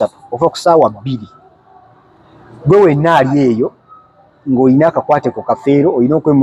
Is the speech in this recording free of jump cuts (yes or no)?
yes